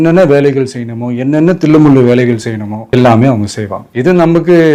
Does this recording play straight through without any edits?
yes; 0 cuts

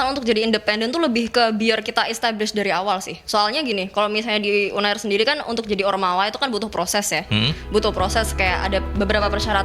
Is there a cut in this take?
no; 0 cuts

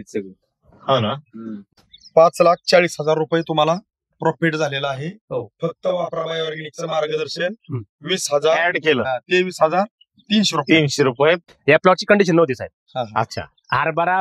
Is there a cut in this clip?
yes; 2 cuts; at 1.6 s, 11.4 s

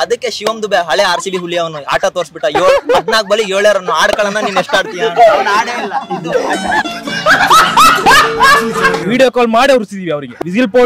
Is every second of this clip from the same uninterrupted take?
no; 1 cut; at 9.0 s

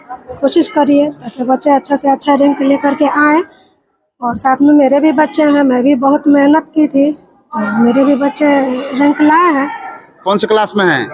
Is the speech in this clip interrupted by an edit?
no; 0 cuts

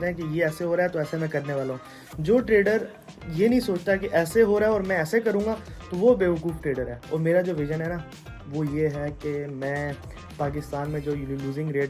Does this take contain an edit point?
yes; 1 cut; at 7.0 s

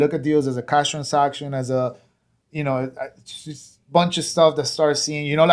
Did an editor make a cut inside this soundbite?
no; 0 cuts

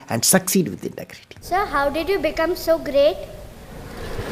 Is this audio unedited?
no; 1 cut; at 1.4 s

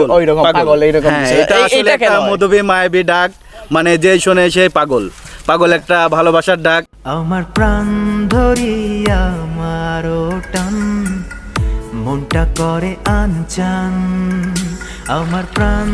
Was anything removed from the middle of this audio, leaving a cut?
yes; 1 cut; at 6.9 s

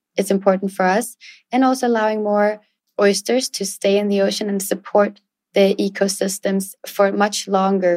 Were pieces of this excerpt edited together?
yes; 1 cut; at 6.7 s

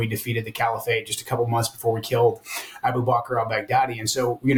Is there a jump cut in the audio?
no; 0 cuts

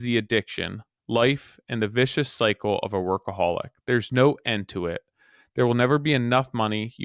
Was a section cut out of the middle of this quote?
no; 0 cuts

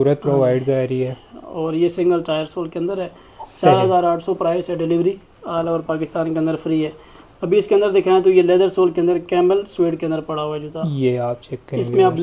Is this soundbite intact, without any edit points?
yes; 0 cuts

